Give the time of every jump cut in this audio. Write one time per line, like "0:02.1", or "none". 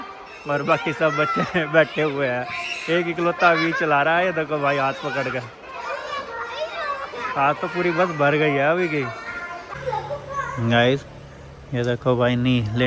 0:09.6